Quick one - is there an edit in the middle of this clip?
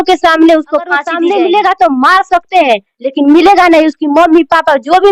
yes; 1 cut; at 1.0 s

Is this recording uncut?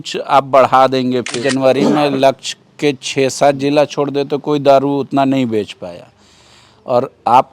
no; 1 cut; at 1.3 s

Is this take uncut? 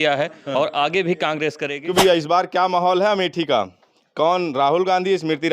no; 1 cut; at 1.7 s

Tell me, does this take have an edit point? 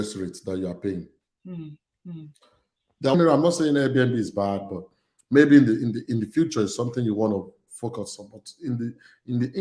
yes; 1 cut; at 3.1 s

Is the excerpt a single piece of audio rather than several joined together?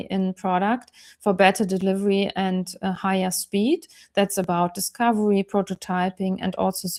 yes; 0 cuts

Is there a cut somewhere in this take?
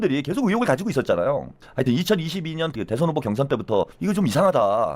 yes; 3 cuts; at 1.6 s, 2.7 s, 3.9 s

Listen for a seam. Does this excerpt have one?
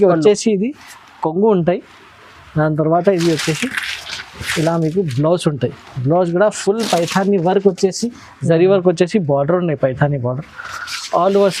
no; 0 cuts

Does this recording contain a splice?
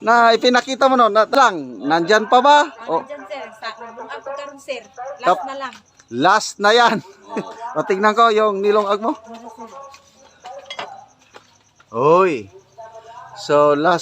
yes; 1 cut; at 1.3 s

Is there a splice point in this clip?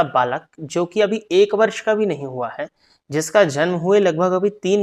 no; 0 cuts

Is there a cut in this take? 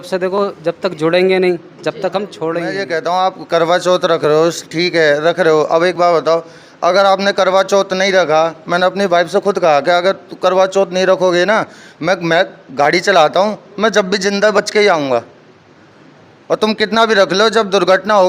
yes; 1 cut; at 2.8 s

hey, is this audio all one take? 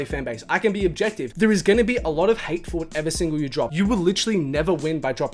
no; 2 cuts; at 1.2 s, 3.7 s

